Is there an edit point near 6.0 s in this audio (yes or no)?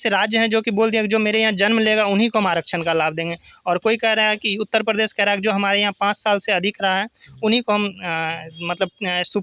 no